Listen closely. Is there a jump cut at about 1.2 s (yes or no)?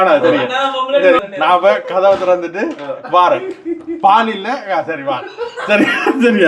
yes